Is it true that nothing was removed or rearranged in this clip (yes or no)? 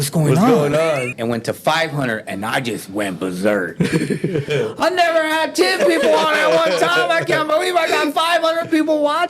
no